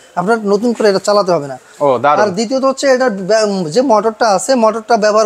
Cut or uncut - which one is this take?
uncut